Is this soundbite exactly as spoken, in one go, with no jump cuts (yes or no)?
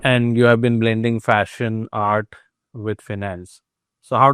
yes